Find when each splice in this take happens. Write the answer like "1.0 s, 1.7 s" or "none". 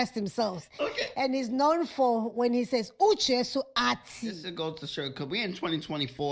4.4 s